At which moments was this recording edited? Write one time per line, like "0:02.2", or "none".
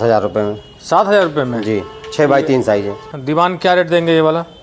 0:03.0